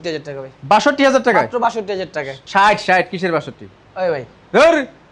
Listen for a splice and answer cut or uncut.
uncut